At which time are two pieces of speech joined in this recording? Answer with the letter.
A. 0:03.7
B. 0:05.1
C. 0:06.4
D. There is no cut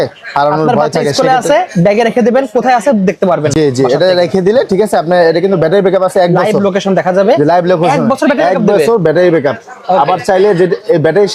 D